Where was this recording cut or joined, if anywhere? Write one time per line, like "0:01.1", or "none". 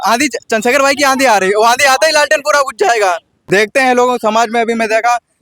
0:03.3